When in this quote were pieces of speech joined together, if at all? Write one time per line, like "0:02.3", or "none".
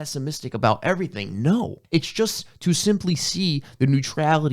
0:01.8